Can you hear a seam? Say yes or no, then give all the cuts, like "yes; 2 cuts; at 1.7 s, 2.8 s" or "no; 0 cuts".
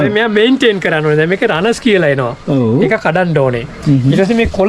no; 0 cuts